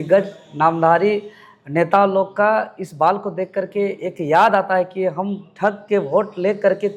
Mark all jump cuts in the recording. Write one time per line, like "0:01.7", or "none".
none